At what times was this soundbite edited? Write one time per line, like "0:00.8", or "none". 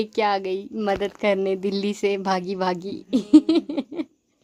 none